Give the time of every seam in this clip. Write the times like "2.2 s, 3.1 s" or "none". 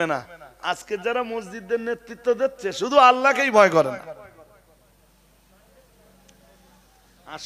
none